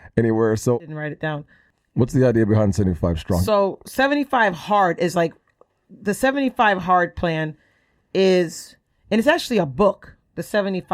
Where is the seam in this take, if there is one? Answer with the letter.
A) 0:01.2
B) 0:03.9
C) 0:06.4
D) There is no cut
A